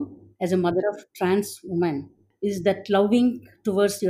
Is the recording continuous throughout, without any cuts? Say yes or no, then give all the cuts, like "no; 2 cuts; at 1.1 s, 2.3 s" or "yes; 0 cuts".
no; 1 cut; at 2.2 s